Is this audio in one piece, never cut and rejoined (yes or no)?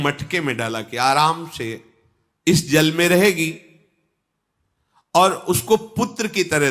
yes